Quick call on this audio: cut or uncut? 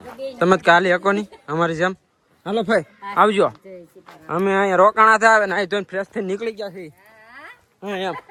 uncut